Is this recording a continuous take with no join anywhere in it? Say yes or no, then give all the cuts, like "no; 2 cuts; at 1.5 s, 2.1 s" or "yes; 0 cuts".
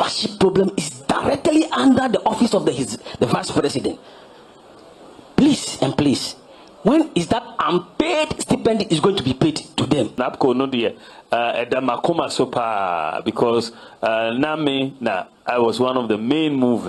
no; 1 cut; at 10.2 s